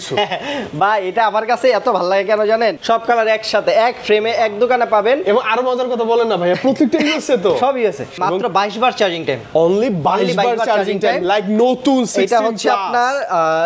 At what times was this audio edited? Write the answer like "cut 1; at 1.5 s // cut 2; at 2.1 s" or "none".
cut 1; at 2.8 s // cut 2; at 8.2 s